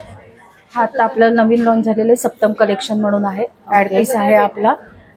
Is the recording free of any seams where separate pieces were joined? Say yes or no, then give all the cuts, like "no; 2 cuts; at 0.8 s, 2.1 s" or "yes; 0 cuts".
yes; 0 cuts